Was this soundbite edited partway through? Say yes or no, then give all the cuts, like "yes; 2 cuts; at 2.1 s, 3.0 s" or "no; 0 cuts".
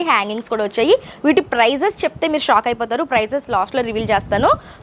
no; 0 cuts